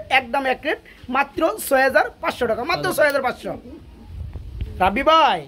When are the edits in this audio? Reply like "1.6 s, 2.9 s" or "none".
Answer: none